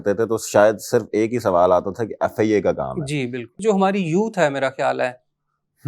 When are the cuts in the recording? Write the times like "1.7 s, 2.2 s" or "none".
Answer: 3.6 s